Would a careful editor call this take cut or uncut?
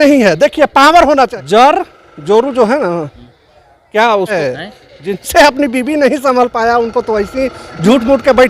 cut